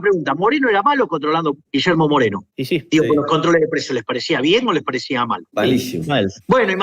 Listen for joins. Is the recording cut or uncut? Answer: cut